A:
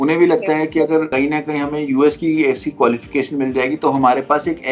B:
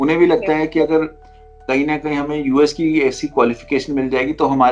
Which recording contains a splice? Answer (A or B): A